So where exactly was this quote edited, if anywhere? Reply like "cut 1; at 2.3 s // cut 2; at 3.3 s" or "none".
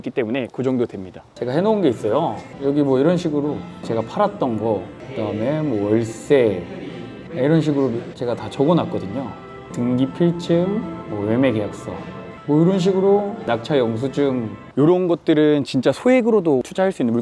cut 1; at 1.3 s // cut 2; at 14.6 s